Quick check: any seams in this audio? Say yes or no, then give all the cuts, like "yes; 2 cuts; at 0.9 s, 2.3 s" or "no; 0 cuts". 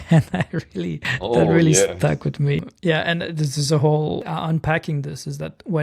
yes; 3 cuts; at 1.1 s, 2.6 s, 4.2 s